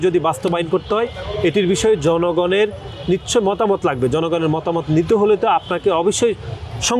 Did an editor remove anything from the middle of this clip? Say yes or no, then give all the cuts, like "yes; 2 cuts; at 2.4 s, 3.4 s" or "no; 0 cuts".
no; 0 cuts